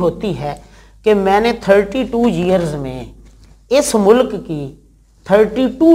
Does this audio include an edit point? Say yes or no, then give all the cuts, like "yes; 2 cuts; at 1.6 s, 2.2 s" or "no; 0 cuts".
no; 0 cuts